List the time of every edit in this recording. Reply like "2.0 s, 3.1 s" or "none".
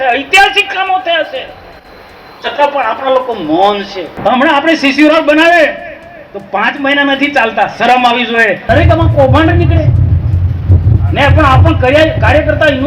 4.1 s, 8.6 s